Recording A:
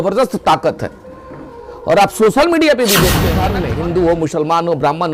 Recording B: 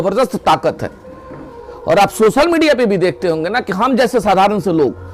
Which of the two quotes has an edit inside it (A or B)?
A